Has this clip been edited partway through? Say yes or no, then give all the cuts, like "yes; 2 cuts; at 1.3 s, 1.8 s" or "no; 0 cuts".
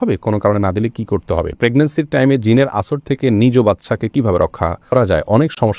yes; 2 cuts; at 1.5 s, 4.9 s